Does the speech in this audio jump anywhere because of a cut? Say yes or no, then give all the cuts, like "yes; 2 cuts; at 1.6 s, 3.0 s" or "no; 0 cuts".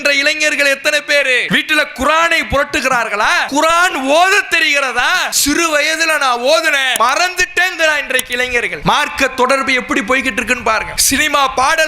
yes; 6 cuts; at 1.4 s, 3.4 s, 5.3 s, 6.9 s, 8.7 s, 10.9 s